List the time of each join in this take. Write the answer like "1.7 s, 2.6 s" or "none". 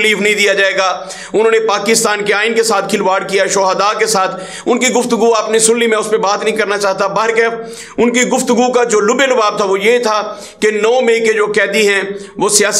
none